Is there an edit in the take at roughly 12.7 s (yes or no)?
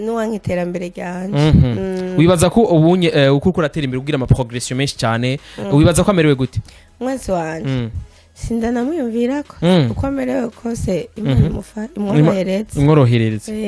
no